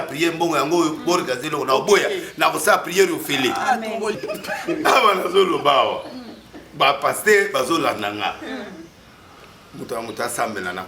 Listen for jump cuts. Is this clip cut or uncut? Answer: cut